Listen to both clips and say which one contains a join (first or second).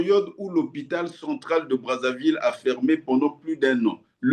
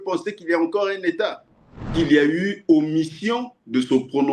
second